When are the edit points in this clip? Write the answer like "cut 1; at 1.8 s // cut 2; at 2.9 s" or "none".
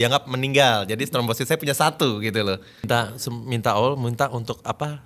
cut 1; at 2.7 s